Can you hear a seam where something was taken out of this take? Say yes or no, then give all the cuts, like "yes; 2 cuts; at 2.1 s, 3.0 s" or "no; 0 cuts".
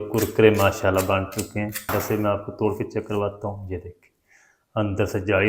yes; 1 cut; at 1.9 s